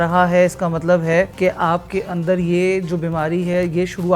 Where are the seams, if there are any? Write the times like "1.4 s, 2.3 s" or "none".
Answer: 1.3 s